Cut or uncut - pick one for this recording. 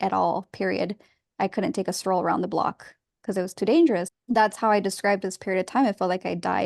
cut